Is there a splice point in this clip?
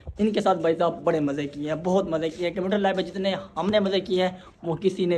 no; 0 cuts

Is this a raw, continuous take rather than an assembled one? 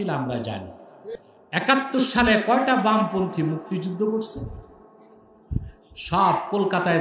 no; 1 cut; at 1.1 s

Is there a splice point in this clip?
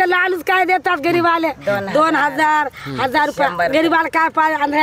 no; 0 cuts

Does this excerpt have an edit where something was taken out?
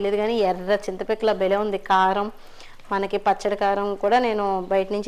no; 0 cuts

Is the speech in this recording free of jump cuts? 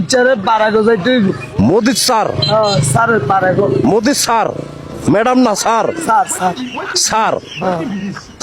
yes; 0 cuts

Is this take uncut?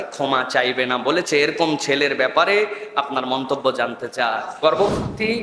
no; 1 cut; at 4.5 s

